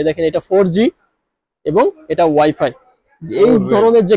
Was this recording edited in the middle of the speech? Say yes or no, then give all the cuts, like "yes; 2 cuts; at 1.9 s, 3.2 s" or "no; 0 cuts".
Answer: no; 0 cuts